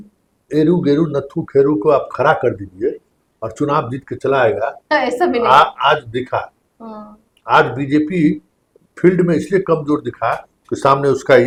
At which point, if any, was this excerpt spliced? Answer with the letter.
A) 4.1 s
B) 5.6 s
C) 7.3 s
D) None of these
D